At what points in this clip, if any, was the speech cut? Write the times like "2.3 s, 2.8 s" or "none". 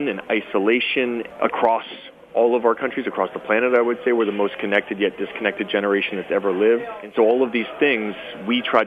1.3 s, 7.1 s

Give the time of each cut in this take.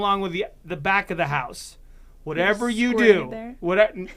none

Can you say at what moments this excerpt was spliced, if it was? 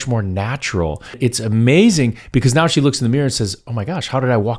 1.2 s, 3.6 s

